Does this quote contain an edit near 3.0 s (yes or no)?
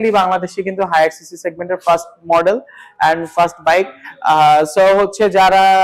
no